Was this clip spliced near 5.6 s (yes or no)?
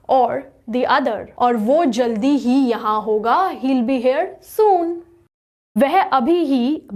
yes